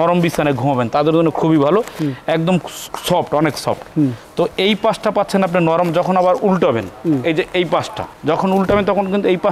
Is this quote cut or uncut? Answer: uncut